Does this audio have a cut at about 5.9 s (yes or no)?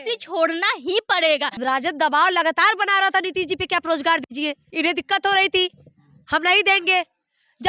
no